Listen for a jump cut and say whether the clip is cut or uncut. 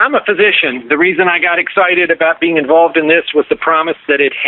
uncut